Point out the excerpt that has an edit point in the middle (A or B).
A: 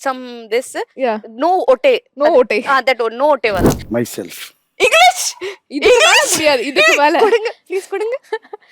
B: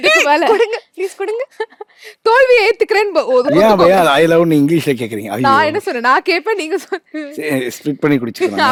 A